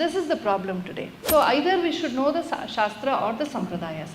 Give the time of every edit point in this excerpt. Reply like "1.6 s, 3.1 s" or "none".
1.2 s